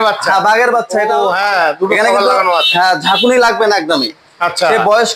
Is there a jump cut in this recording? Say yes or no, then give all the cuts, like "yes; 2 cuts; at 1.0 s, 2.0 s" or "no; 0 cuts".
yes; 1 cut; at 1.1 s